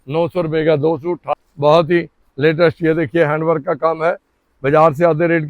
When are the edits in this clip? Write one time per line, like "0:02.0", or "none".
0:01.2